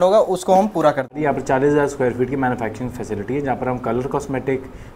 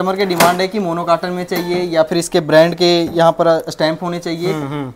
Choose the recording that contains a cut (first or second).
first